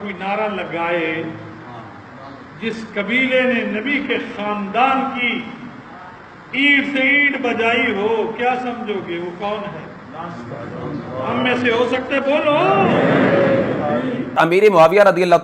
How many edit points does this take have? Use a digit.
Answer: 1